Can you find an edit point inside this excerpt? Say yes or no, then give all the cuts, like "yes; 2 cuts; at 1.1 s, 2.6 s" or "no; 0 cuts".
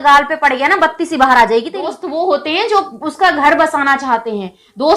yes; 1 cut; at 2.0 s